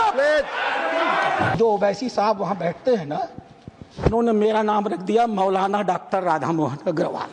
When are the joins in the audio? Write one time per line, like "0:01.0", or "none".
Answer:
0:01.5